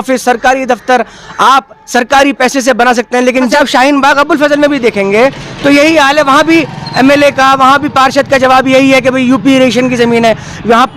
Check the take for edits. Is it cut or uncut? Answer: cut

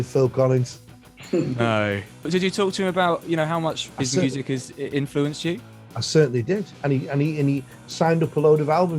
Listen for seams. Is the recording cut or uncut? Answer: cut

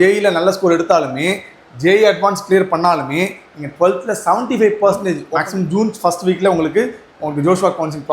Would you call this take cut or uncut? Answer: cut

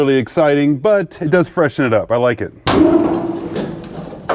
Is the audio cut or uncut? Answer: cut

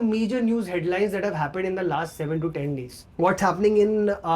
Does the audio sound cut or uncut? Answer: cut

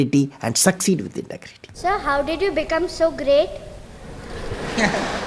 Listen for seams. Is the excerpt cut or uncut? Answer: cut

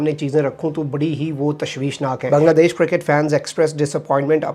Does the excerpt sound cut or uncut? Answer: cut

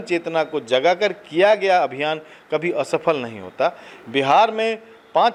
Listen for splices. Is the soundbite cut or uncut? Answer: uncut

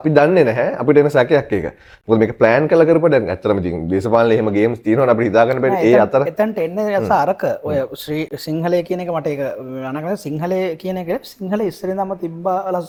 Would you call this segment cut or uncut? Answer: uncut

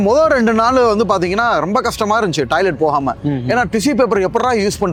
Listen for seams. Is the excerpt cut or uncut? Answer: uncut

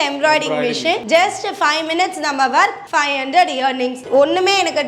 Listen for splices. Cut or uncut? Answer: cut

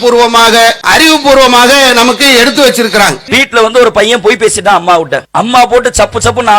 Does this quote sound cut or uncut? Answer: cut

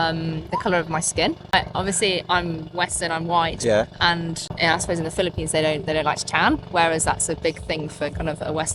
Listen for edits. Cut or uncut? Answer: cut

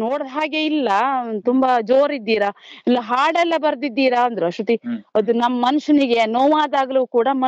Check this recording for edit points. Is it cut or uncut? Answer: uncut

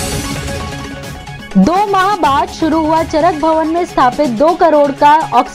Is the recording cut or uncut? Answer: cut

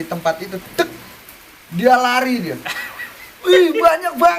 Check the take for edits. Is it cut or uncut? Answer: cut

